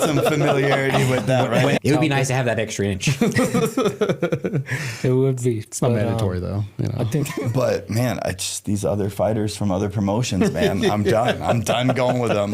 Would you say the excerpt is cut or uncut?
cut